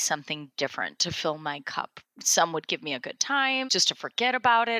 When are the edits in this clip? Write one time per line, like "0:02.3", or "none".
0:02.0
0:03.7